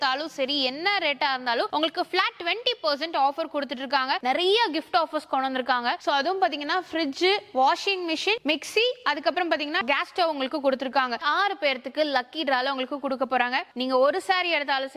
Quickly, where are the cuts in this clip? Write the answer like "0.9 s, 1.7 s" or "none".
4.2 s, 9.8 s, 11.2 s, 13.7 s